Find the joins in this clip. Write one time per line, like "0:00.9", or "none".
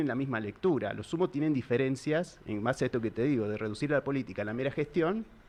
none